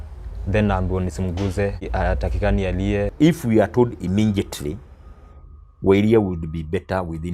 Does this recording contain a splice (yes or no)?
yes